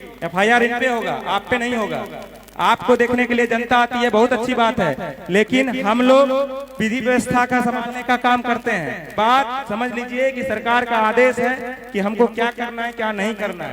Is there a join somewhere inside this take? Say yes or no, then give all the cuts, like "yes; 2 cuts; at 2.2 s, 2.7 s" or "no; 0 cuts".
yes; 1 cut; at 9.0 s